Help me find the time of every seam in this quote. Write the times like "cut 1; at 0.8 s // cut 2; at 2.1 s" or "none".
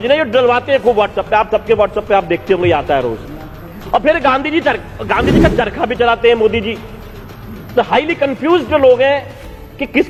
none